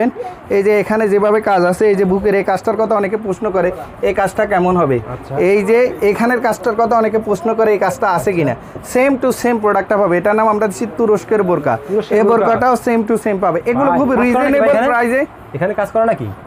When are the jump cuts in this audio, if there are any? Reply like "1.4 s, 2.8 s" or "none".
none